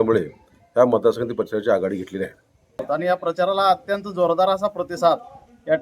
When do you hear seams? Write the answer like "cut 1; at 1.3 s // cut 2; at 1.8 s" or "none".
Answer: cut 1; at 2.9 s